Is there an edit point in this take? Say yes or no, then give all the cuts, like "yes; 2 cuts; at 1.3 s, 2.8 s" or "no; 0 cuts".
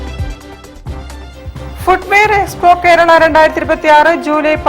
no; 0 cuts